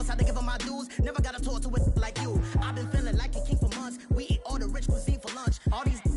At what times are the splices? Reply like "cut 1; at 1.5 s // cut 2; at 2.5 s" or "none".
none